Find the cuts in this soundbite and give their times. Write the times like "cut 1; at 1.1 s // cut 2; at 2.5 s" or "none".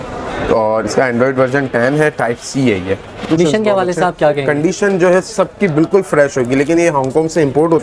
cut 1; at 3.3 s